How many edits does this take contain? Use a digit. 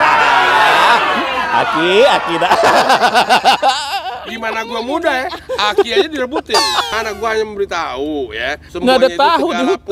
2